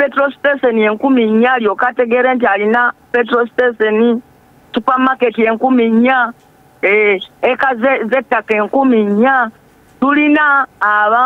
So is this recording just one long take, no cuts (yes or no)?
yes